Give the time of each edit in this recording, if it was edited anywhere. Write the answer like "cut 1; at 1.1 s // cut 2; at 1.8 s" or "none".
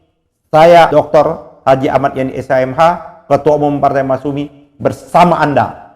cut 1; at 0.9 s